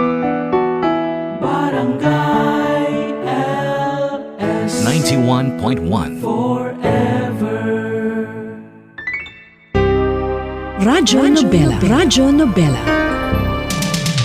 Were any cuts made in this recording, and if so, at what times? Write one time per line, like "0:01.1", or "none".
0:09.6